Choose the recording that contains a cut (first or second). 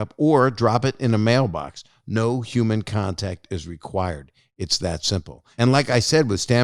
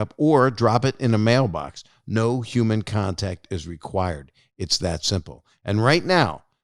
second